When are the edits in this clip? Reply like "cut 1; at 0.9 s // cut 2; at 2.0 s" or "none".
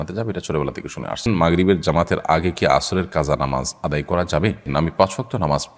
cut 1; at 1.2 s // cut 2; at 4.7 s